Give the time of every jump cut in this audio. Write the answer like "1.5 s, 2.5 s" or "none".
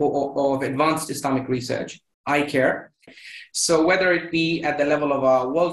3.1 s